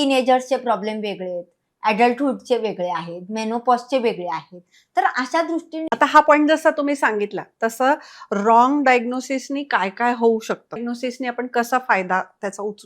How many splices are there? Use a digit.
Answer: 2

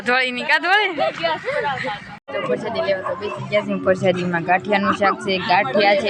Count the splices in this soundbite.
1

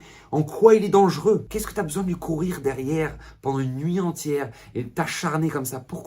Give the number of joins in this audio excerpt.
1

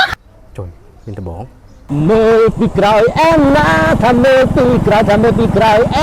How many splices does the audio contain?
1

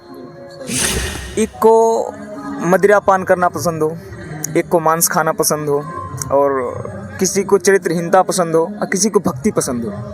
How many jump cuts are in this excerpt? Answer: 1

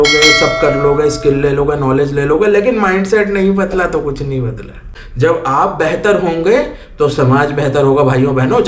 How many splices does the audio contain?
1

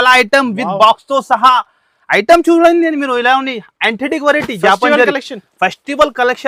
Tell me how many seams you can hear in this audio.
0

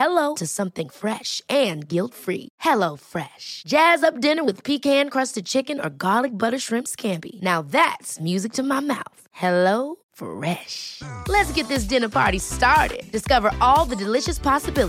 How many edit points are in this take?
0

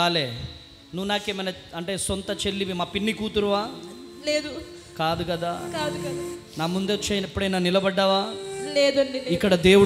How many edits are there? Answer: 0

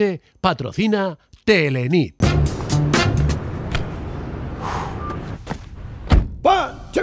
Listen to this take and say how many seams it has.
1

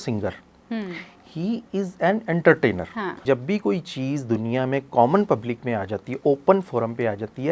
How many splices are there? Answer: 1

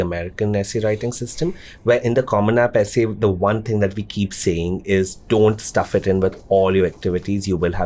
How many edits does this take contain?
0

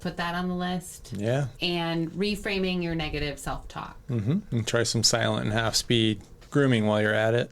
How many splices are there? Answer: 1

